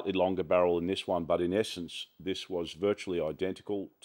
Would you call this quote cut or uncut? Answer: uncut